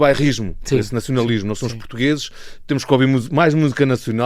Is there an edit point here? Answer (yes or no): no